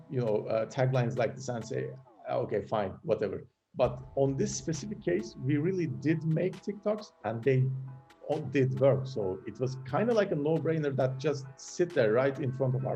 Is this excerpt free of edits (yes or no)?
yes